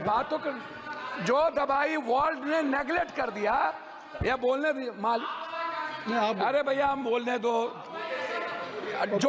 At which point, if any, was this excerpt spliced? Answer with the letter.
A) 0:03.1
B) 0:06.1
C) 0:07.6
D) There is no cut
D